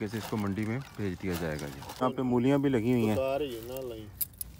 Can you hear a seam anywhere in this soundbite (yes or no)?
yes